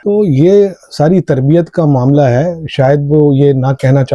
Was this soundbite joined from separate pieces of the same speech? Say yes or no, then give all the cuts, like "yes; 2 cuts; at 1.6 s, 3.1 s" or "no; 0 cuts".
no; 0 cuts